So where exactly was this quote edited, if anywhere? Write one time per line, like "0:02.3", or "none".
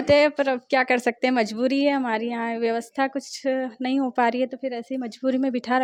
none